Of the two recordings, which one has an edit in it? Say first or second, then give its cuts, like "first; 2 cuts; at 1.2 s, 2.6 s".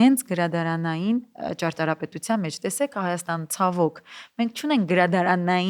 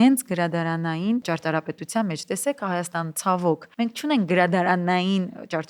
second; 2 cuts; at 1.2 s, 3.7 s